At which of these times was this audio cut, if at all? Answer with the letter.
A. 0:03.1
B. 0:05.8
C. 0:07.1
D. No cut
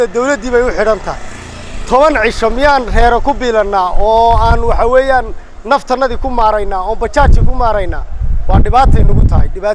D